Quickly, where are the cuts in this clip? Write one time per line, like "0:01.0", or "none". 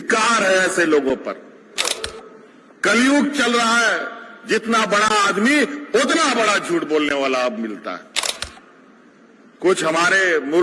0:02.0
0:08.3